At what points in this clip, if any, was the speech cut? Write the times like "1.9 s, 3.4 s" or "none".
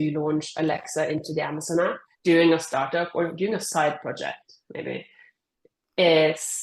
2.1 s